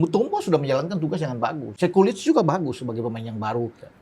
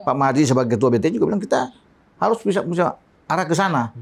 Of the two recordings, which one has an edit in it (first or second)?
first